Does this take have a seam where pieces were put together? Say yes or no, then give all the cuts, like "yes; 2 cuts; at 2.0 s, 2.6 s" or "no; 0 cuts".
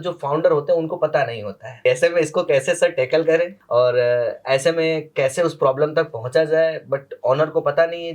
yes; 2 cuts; at 1.7 s, 3.6 s